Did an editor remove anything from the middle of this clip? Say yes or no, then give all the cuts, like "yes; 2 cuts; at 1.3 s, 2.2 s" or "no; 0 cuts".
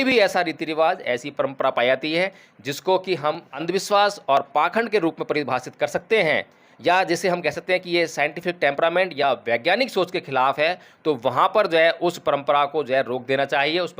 yes; 1 cut; at 3.6 s